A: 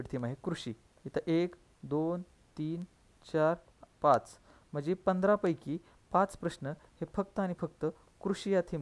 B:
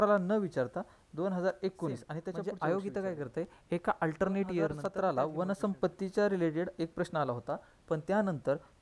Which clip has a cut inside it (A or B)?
B